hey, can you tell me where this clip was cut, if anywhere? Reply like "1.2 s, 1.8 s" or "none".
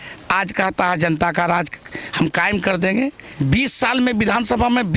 3.3 s